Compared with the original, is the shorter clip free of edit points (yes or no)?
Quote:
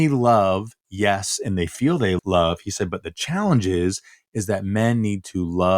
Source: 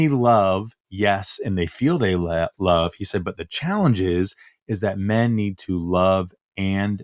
no